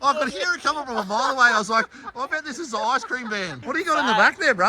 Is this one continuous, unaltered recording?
yes; 0 cuts

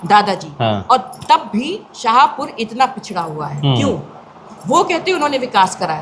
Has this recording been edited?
no; 0 cuts

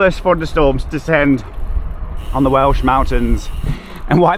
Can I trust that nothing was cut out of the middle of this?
yes; 0 cuts

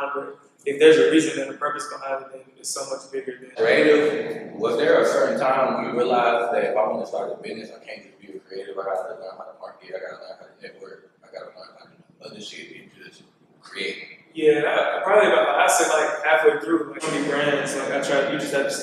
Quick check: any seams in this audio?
yes; 2 cuts; at 3.5 s, 17.0 s

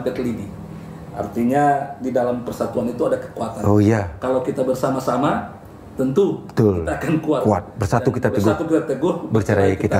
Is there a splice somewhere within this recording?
no; 0 cuts

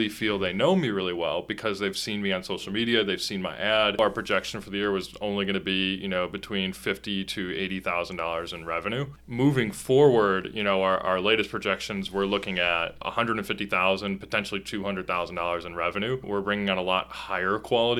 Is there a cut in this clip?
yes; 4 cuts; at 4.0 s, 9.2 s, 13.0 s, 16.2 s

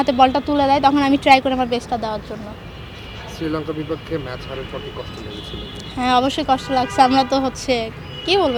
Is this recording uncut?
yes; 0 cuts

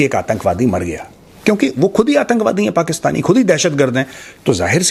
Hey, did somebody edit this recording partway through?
no; 0 cuts

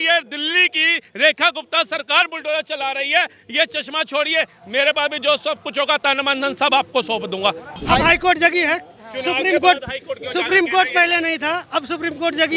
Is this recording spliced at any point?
yes; 1 cut; at 7.7 s

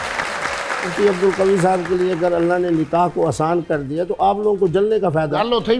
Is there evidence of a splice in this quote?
yes; 1 cut; at 0.9 s

